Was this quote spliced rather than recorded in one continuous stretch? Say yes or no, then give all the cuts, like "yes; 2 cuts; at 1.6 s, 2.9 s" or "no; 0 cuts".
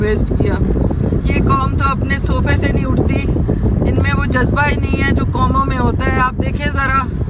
no; 0 cuts